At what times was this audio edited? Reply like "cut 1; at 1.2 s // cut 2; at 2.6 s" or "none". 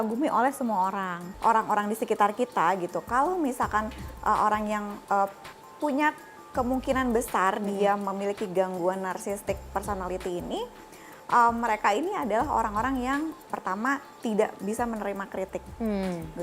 cut 1; at 1.2 s